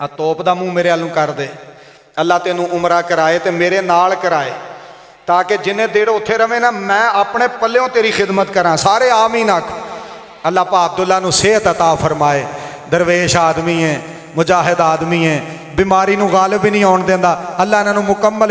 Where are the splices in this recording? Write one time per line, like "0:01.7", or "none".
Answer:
none